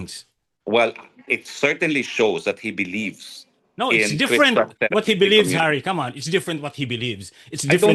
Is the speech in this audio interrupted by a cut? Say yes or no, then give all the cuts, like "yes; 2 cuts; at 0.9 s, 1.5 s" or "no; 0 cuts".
no; 0 cuts